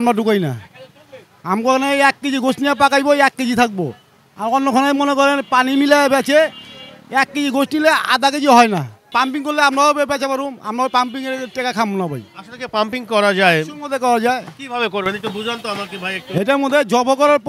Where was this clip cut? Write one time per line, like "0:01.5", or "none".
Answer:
0:09.1